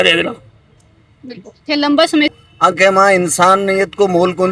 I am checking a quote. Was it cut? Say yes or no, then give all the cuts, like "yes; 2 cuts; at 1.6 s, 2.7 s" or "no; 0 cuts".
yes; 1 cut; at 2.3 s